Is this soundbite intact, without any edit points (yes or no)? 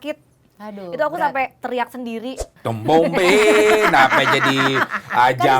no